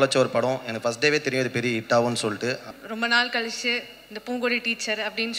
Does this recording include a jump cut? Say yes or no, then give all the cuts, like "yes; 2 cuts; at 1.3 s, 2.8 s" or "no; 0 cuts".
yes; 1 cut; at 2.7 s